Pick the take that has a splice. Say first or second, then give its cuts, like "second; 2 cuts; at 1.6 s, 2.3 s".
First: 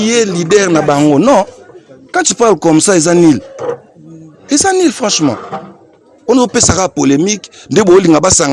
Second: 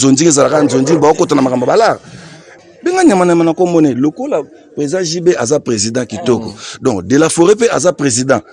second; 1 cut; at 2.5 s